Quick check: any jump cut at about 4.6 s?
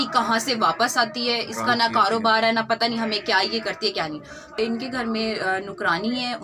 yes; 1 cut; at 4.6 s

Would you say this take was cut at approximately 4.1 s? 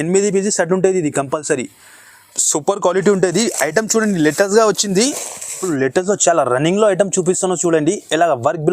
no; 1 cut; at 5.7 s

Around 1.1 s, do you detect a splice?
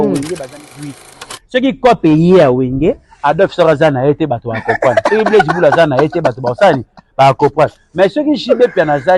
yes; 1 cut; at 1.1 s

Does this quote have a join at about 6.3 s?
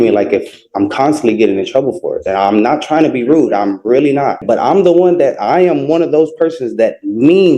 no; 1 cut; at 4.4 s

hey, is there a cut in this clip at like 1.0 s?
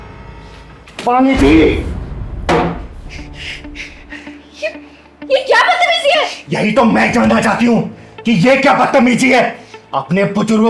yes; 1 cut; at 1.0 s

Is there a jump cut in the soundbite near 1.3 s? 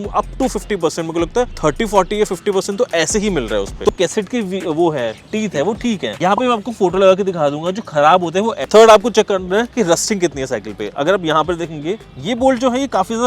no; 2 cuts; at 3.9 s, 8.6 s

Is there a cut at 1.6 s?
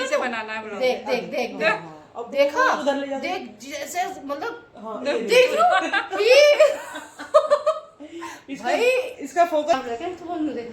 no; 1 cut; at 9.7 s

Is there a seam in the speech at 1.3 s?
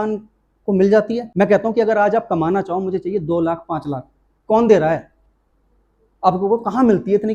yes; 1 cut; at 1.3 s

